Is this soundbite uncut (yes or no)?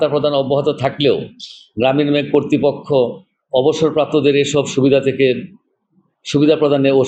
yes